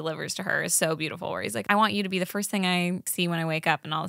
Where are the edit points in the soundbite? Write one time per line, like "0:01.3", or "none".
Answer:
0:01.6
0:03.1